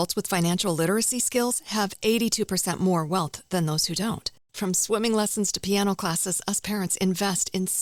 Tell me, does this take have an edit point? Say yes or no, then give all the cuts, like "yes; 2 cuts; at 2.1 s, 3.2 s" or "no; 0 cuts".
no; 0 cuts